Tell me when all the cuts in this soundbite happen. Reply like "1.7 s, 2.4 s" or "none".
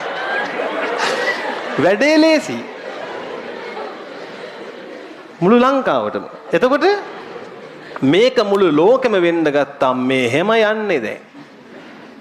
none